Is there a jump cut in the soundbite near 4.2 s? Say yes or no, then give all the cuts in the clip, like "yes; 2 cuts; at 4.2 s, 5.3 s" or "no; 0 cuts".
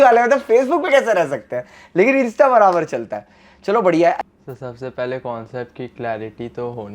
yes; 1 cut; at 4.2 s